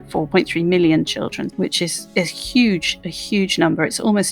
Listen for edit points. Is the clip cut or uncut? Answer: cut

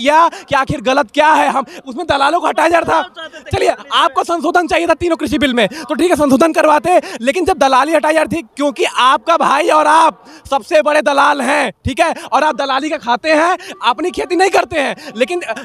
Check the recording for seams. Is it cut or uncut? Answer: uncut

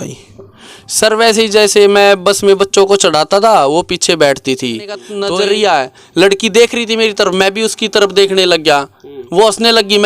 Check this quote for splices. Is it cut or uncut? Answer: cut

